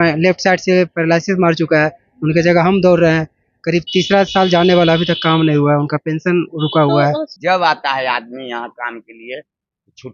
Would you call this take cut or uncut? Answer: cut